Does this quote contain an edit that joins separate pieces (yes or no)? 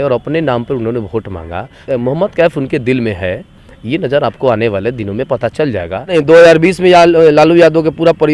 yes